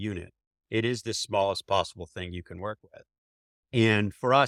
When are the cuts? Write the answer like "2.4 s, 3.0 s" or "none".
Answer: none